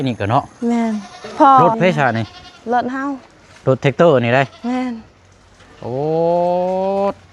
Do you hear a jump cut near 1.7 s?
yes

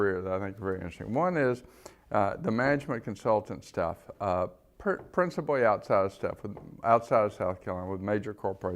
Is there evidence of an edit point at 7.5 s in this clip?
no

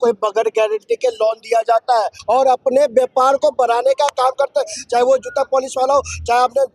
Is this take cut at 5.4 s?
no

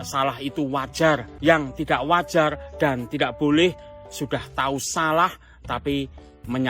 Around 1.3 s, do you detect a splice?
yes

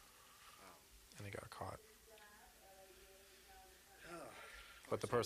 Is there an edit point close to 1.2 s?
no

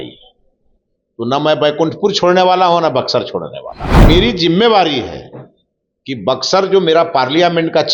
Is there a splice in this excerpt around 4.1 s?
yes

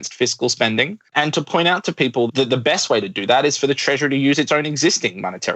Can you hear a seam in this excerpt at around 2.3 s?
yes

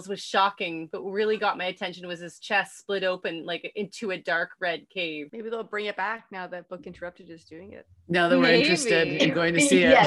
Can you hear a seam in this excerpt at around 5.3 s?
yes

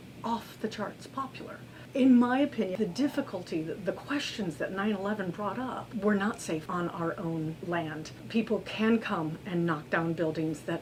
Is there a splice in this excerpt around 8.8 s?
no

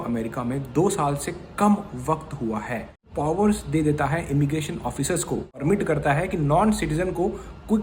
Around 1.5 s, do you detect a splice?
no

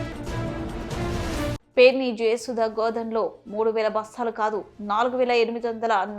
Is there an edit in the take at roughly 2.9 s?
no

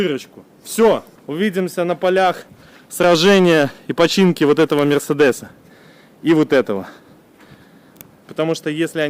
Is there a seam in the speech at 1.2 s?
yes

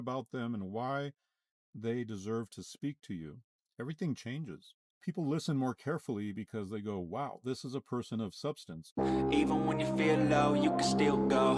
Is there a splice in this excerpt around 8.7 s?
yes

